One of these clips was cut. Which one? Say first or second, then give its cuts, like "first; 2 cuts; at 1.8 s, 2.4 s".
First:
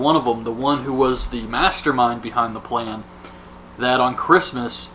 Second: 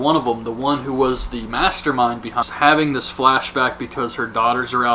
first; 1 cut; at 2.5 s